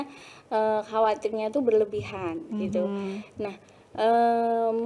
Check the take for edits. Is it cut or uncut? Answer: uncut